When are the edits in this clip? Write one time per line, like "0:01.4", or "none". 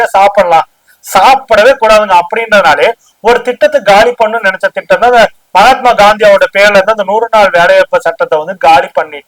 0:05.4